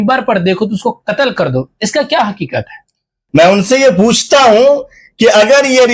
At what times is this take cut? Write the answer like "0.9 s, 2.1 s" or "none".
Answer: 3.2 s